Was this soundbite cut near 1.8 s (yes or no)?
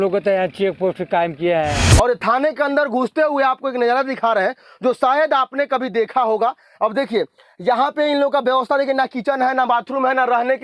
yes